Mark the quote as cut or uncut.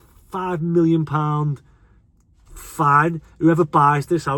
uncut